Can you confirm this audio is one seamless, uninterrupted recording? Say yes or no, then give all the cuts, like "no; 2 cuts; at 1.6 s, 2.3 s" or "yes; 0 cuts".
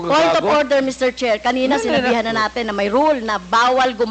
yes; 0 cuts